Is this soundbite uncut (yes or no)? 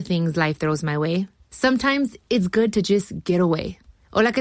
yes